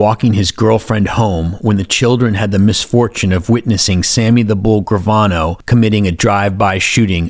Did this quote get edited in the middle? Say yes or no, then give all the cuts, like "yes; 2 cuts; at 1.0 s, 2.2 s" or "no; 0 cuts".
yes; 1 cut; at 5.6 s